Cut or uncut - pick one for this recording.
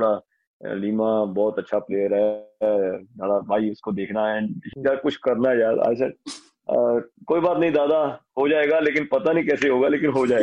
cut